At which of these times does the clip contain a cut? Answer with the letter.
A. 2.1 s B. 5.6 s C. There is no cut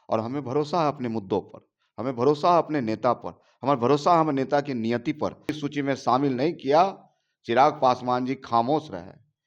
B